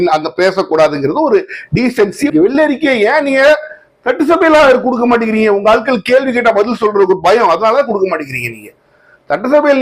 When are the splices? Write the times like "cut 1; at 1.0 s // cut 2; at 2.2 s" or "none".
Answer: cut 1; at 2.3 s